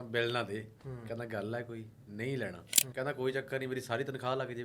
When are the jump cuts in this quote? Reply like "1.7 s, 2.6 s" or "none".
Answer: 2.8 s